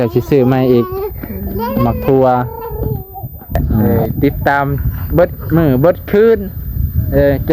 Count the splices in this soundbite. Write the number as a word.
one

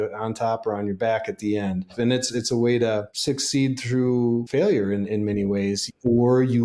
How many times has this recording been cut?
four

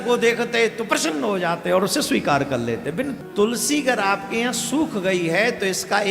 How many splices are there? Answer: one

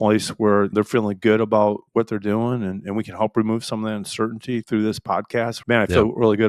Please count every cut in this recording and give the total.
one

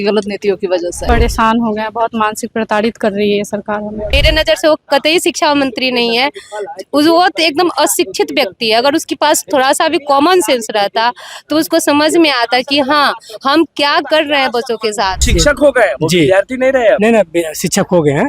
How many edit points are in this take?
three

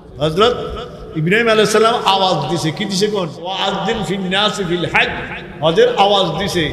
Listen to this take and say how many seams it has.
one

